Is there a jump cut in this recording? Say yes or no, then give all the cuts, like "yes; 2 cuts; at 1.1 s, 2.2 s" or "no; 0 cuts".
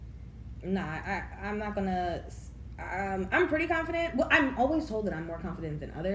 no; 0 cuts